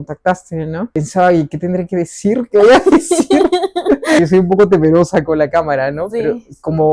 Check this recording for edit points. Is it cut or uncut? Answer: cut